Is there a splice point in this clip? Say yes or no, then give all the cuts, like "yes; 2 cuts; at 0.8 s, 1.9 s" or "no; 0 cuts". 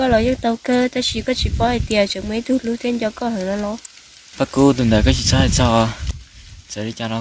no; 0 cuts